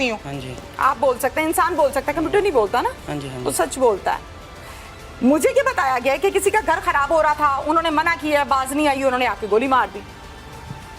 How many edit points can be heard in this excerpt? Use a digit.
0